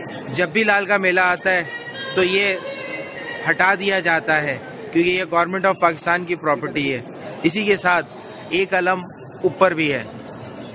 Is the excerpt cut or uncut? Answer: uncut